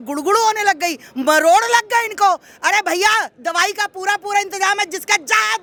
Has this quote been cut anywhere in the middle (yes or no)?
no